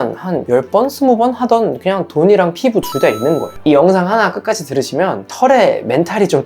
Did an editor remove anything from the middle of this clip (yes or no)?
yes